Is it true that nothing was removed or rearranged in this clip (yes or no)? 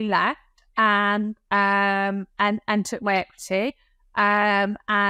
yes